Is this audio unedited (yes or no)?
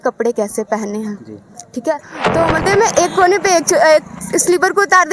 no